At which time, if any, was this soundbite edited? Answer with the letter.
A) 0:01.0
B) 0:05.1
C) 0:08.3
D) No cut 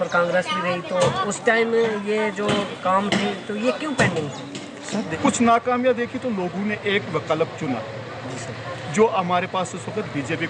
B